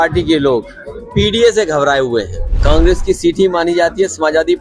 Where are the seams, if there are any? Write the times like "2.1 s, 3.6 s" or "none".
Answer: 2.5 s